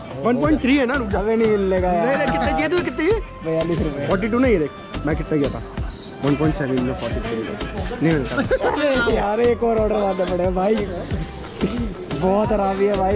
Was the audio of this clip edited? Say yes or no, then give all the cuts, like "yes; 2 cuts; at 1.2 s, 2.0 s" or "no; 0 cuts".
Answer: no; 0 cuts